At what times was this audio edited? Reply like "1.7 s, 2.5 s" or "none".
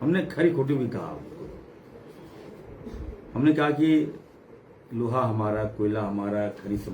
none